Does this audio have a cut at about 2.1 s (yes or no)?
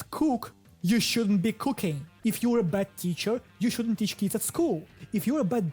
yes